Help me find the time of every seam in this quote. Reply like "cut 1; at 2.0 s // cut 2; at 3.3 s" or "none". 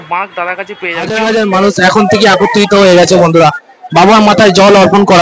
cut 1; at 1.1 s